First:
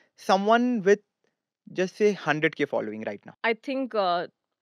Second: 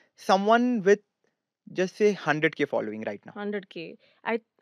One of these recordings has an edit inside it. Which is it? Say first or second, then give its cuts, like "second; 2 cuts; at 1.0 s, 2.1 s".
first; 1 cut; at 3.2 s